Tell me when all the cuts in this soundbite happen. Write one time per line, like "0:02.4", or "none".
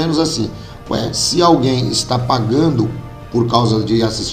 none